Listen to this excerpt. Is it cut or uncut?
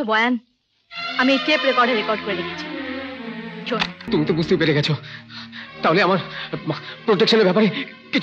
cut